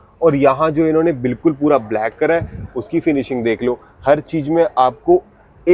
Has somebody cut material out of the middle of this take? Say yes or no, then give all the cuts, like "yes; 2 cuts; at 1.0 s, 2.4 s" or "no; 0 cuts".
no; 0 cuts